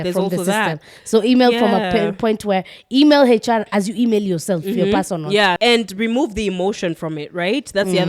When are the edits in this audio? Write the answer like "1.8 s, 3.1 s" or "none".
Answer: 5.6 s